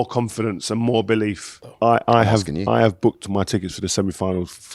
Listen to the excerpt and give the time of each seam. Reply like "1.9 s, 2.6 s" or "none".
1.6 s